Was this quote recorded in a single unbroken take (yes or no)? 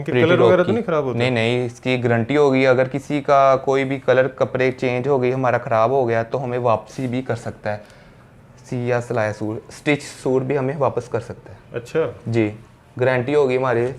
yes